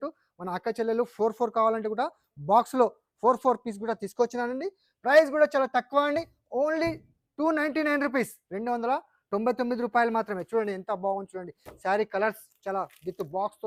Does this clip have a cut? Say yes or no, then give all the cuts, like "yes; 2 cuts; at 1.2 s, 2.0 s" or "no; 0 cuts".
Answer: no; 0 cuts